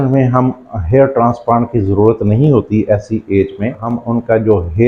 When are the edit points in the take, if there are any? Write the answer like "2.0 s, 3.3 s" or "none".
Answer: 3.9 s